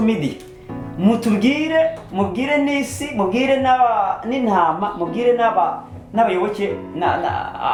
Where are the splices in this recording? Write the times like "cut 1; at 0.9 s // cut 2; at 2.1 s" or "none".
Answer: none